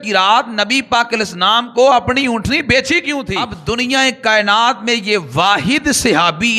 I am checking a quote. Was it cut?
yes; 1 cut; at 3.4 s

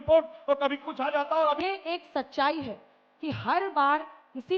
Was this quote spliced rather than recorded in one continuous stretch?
yes; 1 cut; at 1.6 s

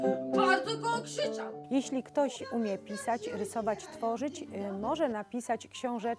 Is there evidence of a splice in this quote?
yes; 1 cut; at 1.5 s

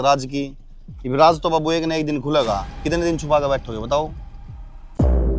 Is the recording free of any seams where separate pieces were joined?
yes; 0 cuts

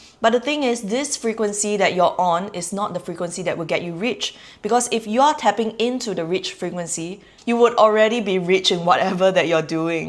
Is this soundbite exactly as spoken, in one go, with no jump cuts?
yes; 0 cuts

